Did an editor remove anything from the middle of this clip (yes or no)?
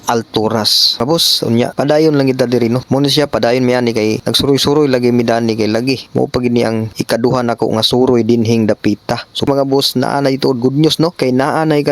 yes